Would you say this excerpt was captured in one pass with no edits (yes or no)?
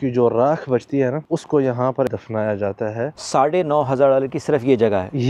no